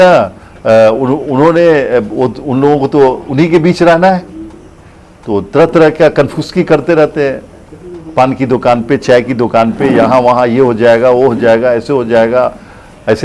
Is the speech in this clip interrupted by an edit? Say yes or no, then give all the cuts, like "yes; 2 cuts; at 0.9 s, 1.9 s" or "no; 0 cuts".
no; 0 cuts